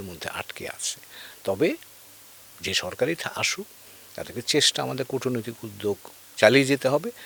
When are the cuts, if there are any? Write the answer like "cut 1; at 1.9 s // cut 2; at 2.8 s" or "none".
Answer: none